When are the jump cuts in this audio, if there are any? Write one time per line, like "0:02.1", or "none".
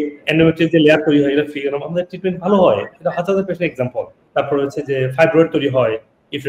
none